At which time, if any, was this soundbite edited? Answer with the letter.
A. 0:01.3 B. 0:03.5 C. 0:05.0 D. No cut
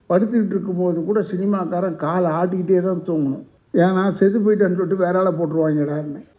B